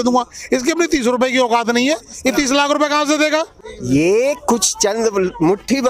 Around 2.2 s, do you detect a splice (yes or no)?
no